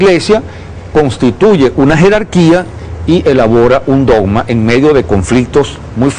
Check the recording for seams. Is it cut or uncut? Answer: cut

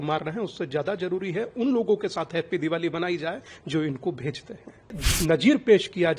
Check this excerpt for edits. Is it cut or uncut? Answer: cut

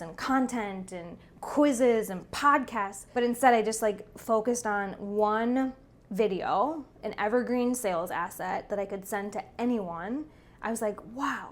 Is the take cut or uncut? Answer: cut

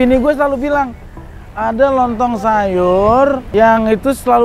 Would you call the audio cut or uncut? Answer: cut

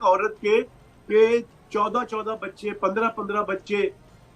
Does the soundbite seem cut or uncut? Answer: uncut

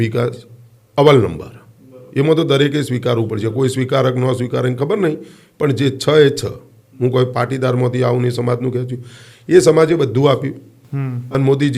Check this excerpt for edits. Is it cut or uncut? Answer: uncut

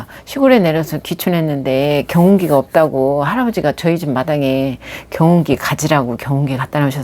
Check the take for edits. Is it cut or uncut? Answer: uncut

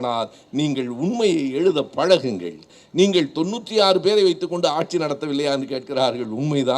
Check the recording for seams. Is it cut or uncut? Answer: cut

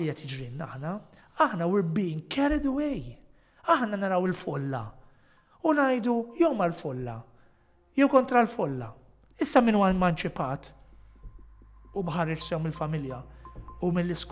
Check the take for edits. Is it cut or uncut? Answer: uncut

